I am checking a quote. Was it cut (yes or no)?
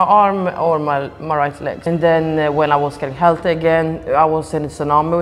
yes